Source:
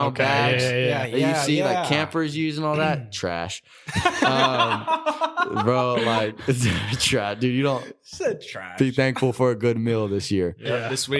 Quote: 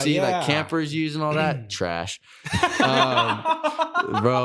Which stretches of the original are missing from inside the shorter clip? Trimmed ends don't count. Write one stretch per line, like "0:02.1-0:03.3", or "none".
none